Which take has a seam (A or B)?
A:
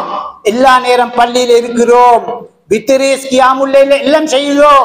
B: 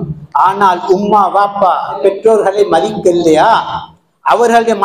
B